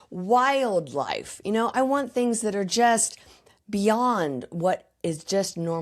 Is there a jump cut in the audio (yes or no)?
no